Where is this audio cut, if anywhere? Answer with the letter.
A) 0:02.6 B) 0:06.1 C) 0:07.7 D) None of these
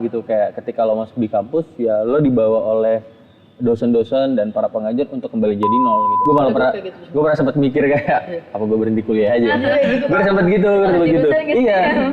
B